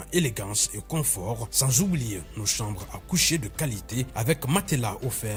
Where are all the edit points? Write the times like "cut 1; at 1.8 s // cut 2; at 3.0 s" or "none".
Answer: none